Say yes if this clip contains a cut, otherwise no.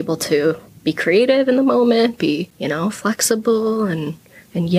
yes